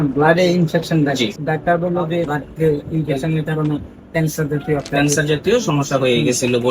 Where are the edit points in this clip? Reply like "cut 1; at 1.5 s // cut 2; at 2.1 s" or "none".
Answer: cut 1; at 1.4 s // cut 2; at 2.3 s